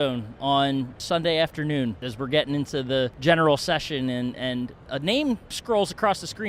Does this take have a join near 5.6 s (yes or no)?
yes